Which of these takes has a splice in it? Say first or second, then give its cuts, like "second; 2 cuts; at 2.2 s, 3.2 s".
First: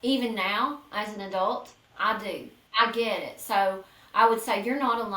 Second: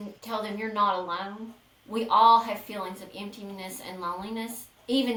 first; 1 cut; at 2.5 s